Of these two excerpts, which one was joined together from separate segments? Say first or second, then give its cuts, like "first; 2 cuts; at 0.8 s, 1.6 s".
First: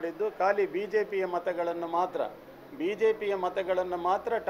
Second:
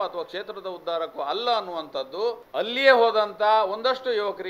second; 1 cut; at 2.4 s